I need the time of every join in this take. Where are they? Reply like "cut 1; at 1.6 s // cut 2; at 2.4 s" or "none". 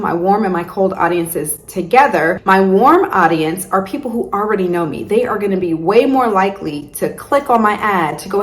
cut 1; at 2.4 s